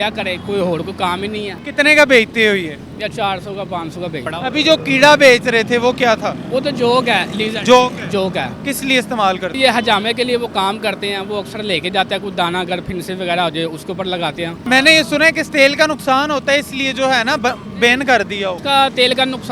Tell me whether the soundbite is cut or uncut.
cut